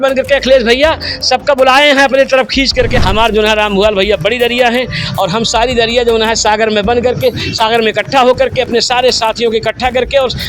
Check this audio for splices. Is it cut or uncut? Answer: cut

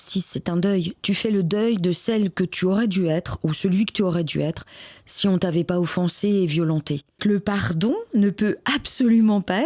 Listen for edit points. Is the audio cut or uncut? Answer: cut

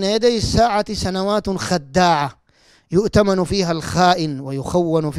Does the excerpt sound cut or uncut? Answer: uncut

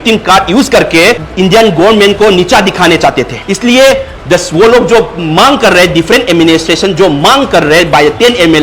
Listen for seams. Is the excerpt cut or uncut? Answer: cut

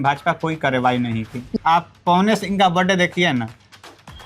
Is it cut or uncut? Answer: cut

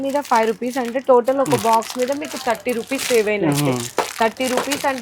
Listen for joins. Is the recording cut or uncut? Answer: uncut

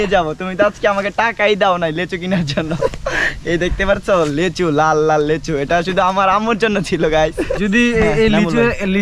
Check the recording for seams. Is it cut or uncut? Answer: cut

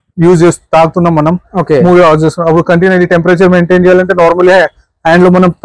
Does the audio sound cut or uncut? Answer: uncut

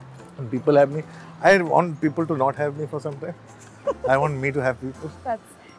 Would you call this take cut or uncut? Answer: uncut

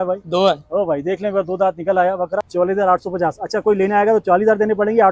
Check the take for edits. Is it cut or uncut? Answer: cut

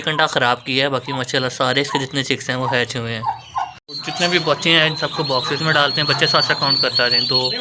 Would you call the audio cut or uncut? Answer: cut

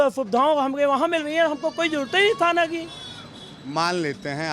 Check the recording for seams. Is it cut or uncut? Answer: uncut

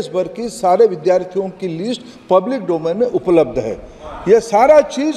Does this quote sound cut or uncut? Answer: uncut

